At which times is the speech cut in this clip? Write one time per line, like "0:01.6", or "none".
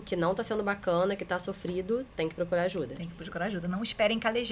none